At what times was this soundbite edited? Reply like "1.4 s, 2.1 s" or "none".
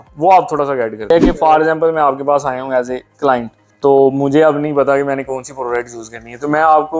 1.1 s, 3.6 s